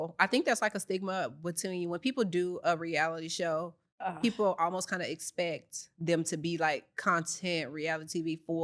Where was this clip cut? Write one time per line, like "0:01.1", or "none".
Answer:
none